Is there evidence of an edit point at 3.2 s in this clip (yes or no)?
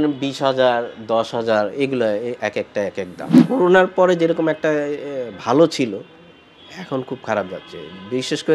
yes